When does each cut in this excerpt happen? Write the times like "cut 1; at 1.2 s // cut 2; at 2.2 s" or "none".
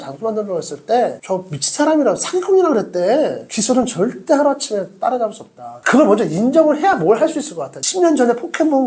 cut 1; at 3.4 s // cut 2; at 7.9 s